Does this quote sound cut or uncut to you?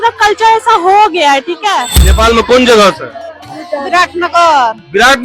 cut